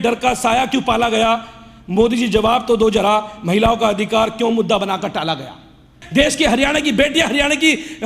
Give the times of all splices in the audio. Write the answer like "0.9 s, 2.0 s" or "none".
6.0 s